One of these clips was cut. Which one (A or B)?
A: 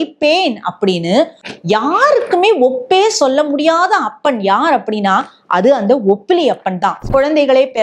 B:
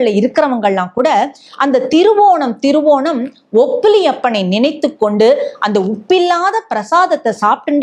A